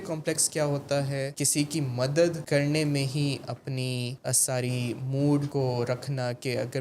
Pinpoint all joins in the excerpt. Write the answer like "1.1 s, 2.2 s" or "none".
1.4 s, 2.4 s, 4.1 s, 5.5 s